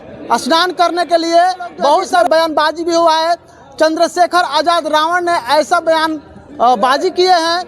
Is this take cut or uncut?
cut